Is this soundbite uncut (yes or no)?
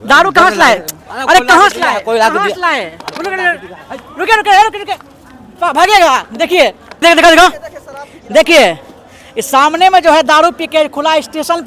no